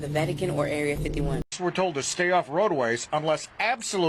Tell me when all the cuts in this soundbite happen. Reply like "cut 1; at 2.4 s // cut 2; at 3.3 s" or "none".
cut 1; at 1.5 s